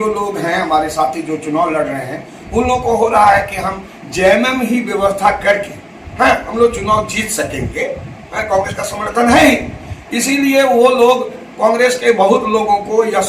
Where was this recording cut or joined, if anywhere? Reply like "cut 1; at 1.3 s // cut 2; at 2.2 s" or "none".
none

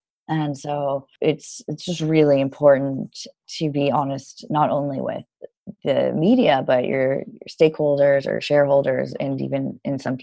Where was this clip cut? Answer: cut 1; at 1.1 s

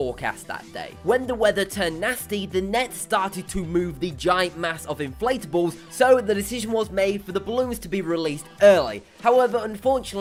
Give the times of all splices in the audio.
none

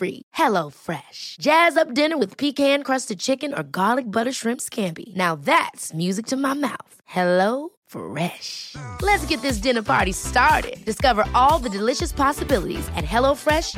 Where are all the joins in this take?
none

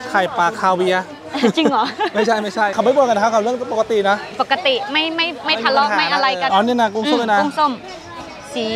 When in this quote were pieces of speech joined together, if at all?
cut 1; at 2.7 s // cut 2; at 6.5 s

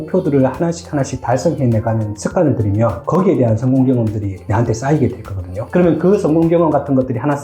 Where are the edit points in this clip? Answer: cut 1; at 5.6 s

